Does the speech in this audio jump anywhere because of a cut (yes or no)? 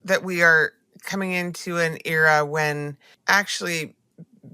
yes